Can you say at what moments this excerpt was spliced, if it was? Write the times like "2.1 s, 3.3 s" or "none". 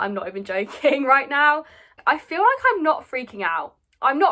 2.0 s